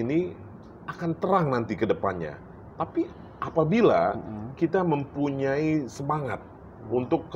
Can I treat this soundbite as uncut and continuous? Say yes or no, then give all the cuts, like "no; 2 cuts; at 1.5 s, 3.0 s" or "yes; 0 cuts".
yes; 0 cuts